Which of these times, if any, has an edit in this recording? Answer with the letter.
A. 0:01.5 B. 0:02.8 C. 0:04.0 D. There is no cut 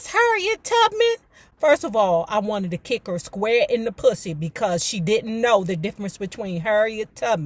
D